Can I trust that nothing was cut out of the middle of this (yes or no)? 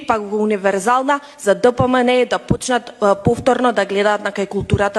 yes